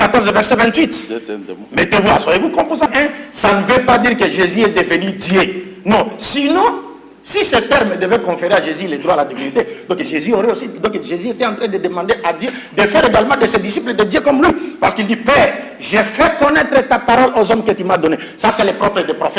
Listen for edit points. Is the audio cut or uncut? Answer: cut